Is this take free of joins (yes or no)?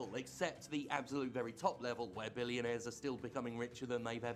yes